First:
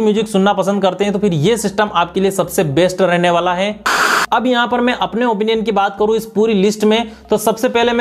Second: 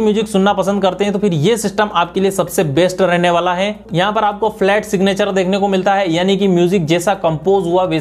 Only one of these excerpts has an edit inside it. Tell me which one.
first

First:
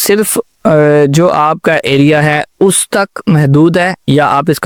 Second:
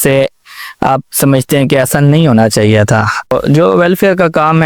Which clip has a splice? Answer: second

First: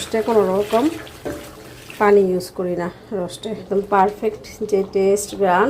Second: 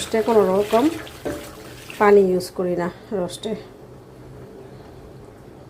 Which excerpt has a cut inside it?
first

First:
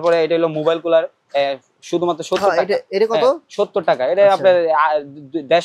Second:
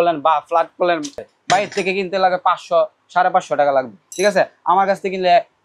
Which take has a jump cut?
second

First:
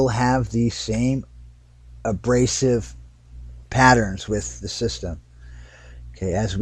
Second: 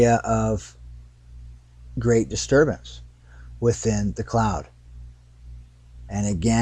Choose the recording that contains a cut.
first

